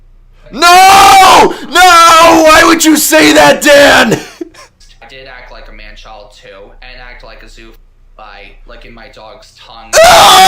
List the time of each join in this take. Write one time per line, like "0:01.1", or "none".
0:04.8